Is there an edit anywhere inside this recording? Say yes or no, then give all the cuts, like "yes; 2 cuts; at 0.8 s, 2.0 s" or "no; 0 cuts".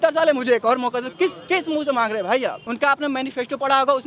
yes; 1 cut; at 2.6 s